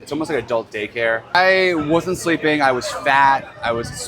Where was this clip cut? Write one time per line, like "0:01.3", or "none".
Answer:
0:01.4